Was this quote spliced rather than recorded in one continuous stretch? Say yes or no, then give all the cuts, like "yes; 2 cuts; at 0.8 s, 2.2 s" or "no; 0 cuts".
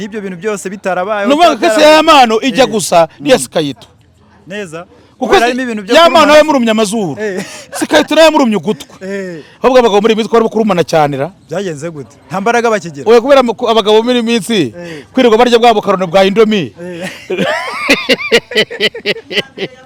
no; 0 cuts